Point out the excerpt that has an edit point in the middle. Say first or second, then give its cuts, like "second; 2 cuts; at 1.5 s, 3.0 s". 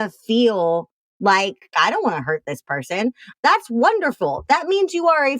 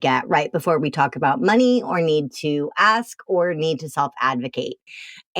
first; 2 cuts; at 1.7 s, 3.2 s